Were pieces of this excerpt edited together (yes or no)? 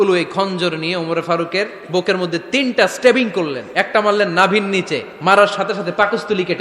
yes